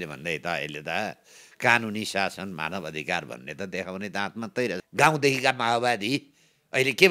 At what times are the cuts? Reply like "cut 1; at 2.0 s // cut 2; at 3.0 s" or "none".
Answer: cut 1; at 4.8 s